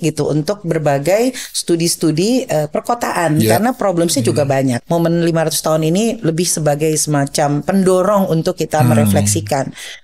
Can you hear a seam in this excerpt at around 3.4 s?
no; 1 cut; at 4.8 s

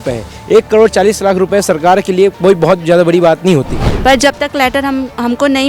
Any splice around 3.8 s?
yes; 1 cut; at 3.8 s

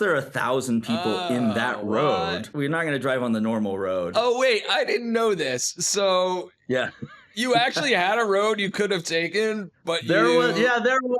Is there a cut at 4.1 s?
yes; 2 cuts; at 2.5 s, 4.1 s

